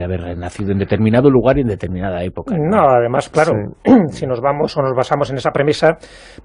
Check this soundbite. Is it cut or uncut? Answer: uncut